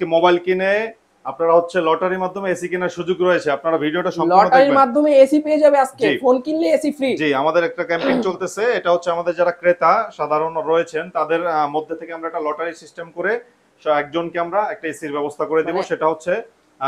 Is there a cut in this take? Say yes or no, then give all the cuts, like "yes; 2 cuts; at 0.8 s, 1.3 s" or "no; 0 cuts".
no; 0 cuts